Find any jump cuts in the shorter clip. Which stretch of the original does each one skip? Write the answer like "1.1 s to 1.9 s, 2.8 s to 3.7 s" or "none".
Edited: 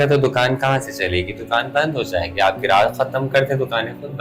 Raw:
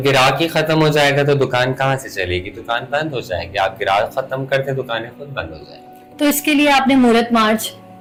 none